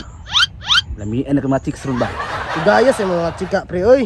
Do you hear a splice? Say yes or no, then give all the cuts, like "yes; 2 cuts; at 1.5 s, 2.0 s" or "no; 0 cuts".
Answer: no; 0 cuts